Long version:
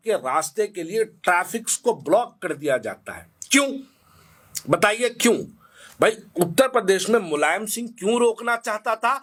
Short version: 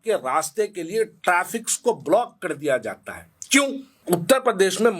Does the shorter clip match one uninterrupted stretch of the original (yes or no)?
no